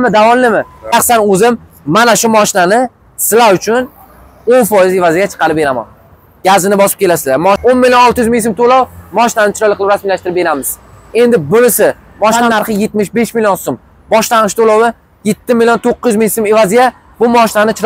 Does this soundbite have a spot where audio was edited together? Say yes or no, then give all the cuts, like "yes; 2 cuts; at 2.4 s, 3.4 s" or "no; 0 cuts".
yes; 3 cuts; at 0.9 s, 7.6 s, 12.4 s